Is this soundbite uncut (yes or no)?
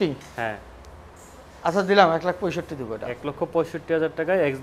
yes